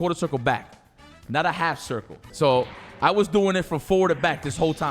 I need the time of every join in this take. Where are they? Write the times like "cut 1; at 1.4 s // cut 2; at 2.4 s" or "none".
cut 1; at 2.2 s